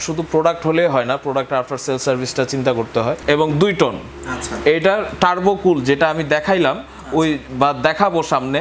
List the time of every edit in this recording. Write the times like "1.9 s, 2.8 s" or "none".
3.2 s